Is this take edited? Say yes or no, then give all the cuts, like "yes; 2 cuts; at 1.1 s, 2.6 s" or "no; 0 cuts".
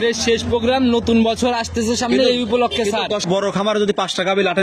yes; 1 cut; at 3.3 s